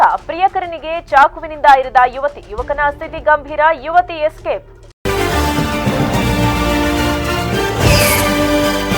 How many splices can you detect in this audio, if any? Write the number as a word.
one